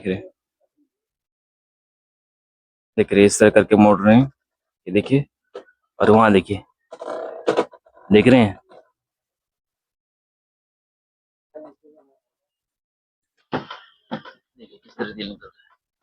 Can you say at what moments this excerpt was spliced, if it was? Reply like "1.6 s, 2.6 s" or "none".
none